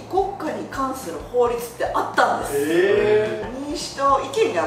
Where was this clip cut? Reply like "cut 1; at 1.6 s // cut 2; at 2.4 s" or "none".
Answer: cut 1; at 3.4 s